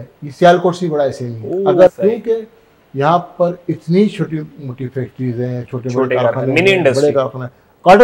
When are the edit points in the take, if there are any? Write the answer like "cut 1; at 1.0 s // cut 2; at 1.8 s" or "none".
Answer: cut 1; at 1.9 s